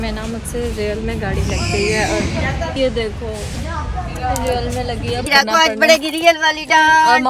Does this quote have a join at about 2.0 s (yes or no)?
no